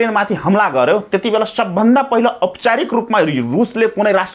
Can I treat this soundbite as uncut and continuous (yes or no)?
yes